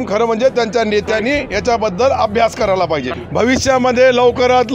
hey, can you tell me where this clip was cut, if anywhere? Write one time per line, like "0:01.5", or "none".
0:03.1